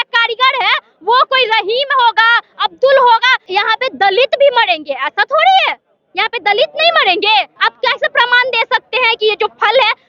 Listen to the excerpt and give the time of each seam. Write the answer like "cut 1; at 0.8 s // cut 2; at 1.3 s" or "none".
cut 1; at 3.4 s // cut 2; at 7.6 s